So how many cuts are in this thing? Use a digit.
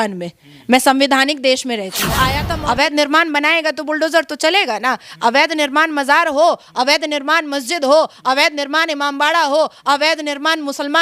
1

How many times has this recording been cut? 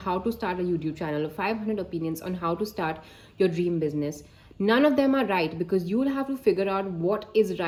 0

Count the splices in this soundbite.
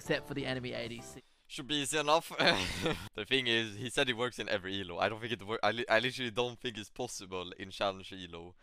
2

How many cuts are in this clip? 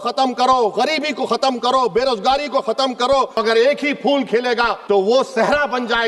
2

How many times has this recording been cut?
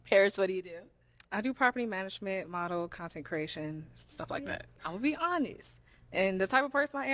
1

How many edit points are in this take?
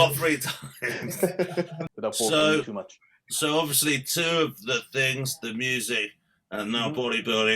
1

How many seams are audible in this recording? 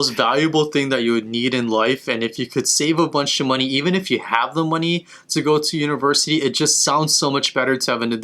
0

